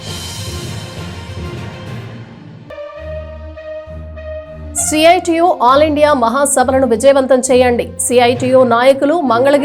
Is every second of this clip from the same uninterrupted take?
no; 1 cut; at 4.4 s

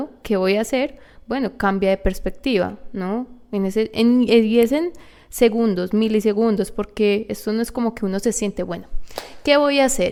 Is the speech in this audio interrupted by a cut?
no; 0 cuts

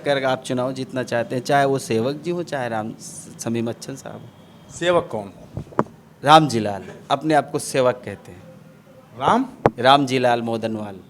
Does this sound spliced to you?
no; 0 cuts

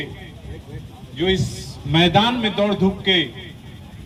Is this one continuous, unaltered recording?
yes; 0 cuts

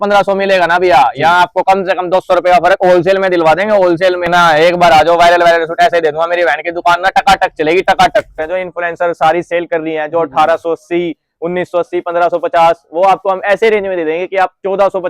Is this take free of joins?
no; 2 cuts; at 4.3 s, 8.4 s

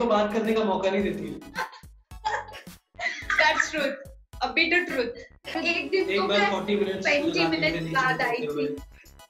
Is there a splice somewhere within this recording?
yes; 1 cut; at 5.5 s

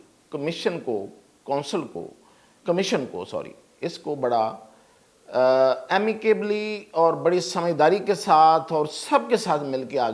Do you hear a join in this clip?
no; 0 cuts

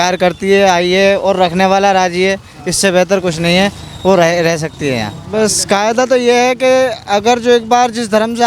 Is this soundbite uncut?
no; 1 cut; at 5.2 s

